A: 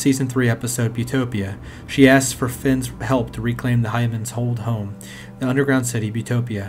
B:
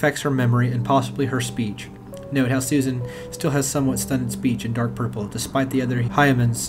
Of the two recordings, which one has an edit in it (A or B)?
A